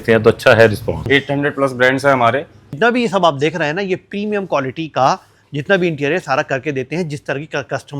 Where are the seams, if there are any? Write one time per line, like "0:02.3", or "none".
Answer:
0:01.0
0:02.7